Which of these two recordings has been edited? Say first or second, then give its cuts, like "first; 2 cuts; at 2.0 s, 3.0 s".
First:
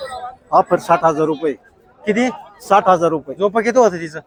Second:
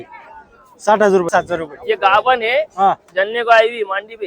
second; 1 cut; at 1.3 s